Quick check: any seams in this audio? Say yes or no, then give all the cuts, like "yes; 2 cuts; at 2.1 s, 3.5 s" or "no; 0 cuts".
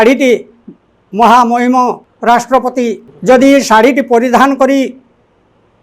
yes; 2 cuts; at 2.1 s, 3.1 s